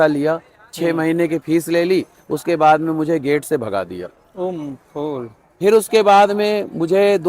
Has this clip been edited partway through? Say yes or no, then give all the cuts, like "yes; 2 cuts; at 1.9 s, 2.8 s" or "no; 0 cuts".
no; 0 cuts